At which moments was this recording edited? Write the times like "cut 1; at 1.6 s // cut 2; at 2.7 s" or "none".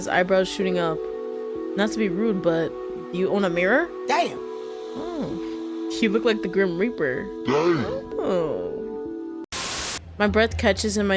cut 1; at 9.4 s